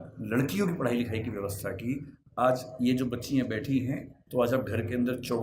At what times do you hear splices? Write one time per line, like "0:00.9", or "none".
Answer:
0:04.1